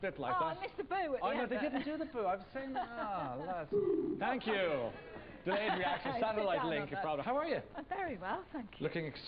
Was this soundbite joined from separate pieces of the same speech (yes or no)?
no